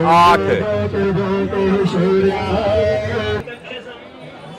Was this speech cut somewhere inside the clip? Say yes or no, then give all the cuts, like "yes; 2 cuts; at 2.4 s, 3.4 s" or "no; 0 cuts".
yes; 1 cut; at 3.4 s